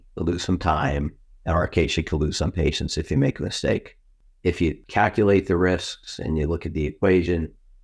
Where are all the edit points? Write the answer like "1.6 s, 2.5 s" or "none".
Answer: 4.6 s